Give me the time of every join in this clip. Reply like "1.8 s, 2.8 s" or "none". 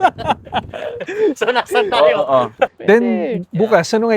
2.7 s

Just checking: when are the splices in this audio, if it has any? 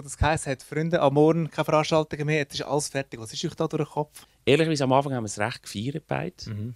4.2 s

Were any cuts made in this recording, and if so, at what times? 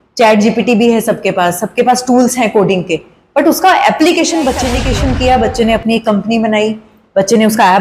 4.8 s

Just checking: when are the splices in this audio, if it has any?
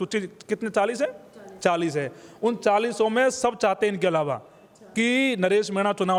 none

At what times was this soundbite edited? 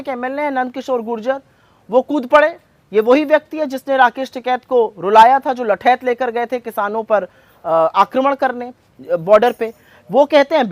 none

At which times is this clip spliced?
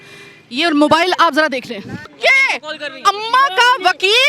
2.1 s

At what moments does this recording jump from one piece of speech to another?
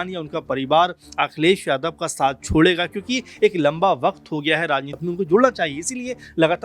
5.0 s

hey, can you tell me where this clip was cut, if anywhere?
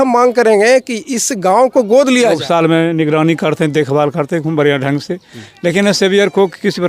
2.4 s

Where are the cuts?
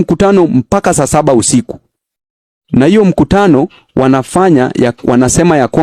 none

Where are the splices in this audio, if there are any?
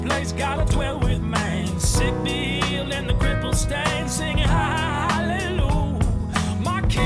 none

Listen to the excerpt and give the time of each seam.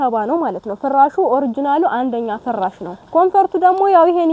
2.7 s

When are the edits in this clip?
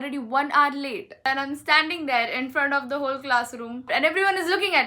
1.2 s, 3.9 s

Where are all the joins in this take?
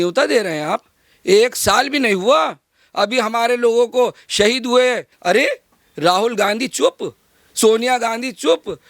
5.1 s

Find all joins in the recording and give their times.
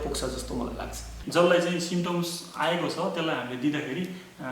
1.2 s

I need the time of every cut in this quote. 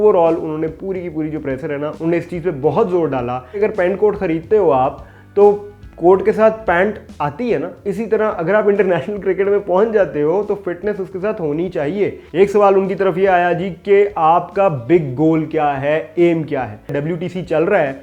3.4 s, 12.2 s, 16.9 s

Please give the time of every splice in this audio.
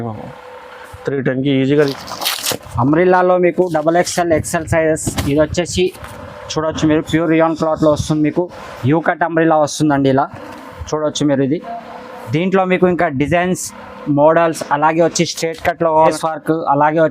1.9 s, 16.1 s

